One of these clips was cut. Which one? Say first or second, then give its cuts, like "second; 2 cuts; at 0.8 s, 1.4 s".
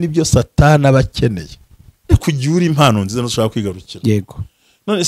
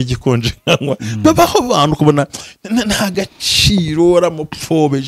first; 1 cut; at 2.1 s